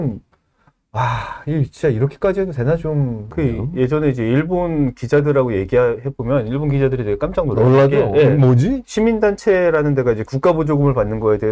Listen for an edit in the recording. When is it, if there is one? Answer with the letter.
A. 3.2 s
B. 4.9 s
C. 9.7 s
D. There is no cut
A